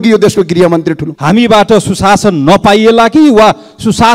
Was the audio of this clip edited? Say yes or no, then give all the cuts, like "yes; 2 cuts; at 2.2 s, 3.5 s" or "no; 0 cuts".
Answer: yes; 1 cut; at 1.1 s